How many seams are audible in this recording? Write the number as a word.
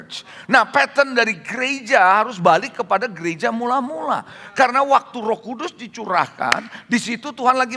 zero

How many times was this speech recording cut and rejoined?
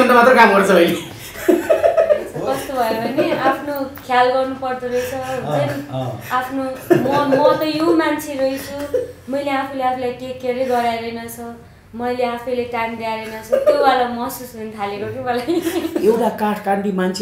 two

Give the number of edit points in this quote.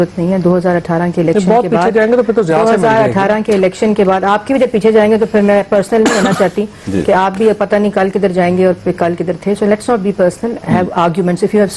zero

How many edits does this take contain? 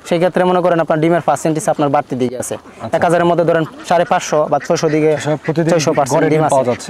zero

